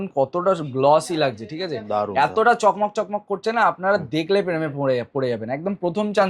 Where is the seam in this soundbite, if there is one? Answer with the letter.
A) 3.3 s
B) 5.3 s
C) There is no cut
C